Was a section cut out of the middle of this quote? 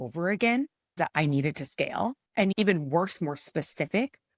yes; 2 cuts; at 1.0 s, 2.5 s

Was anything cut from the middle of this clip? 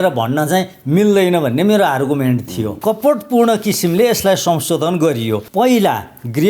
yes; 2 cuts; at 2.6 s, 5.4 s

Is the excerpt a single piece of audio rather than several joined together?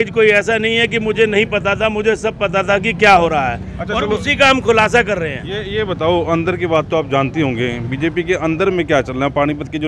yes; 0 cuts

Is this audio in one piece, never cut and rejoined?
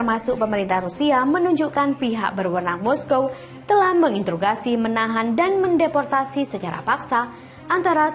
yes; 0 cuts

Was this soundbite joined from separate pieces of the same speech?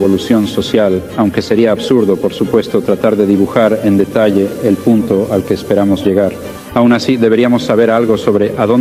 no; 0 cuts

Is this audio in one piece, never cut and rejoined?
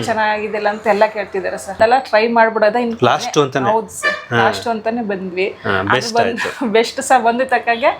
no; 1 cut; at 1.8 s

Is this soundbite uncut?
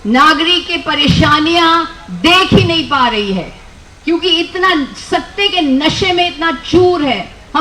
yes; 0 cuts

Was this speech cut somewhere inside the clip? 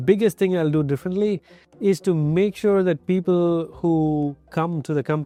no; 0 cuts

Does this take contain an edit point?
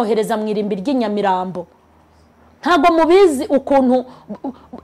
no; 0 cuts

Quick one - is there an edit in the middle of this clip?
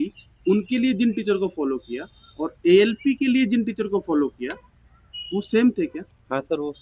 no; 0 cuts

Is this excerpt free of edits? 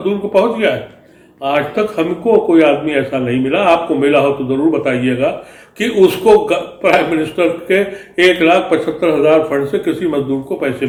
yes; 0 cuts

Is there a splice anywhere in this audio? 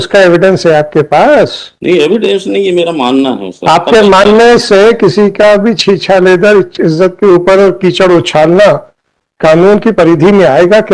no; 0 cuts

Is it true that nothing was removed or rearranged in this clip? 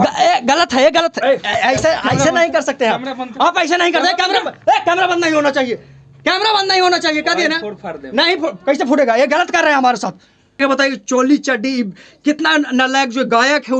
no; 1 cut; at 10.6 s

